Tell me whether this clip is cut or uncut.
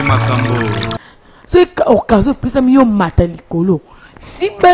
cut